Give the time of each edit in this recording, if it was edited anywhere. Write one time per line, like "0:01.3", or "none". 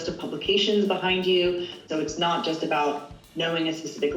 0:01.9